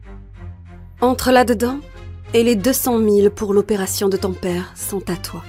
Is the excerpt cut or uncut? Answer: uncut